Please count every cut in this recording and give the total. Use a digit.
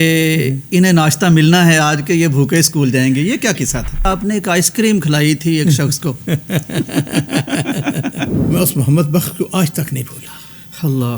2